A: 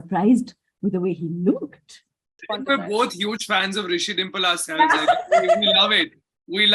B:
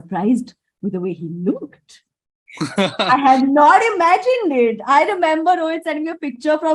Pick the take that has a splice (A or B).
A